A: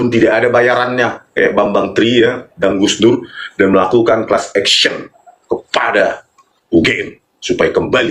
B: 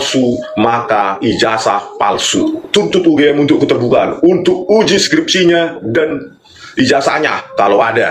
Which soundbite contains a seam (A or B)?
B